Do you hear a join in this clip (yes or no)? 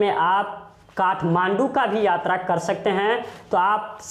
no